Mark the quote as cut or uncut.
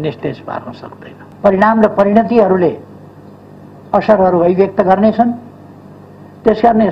cut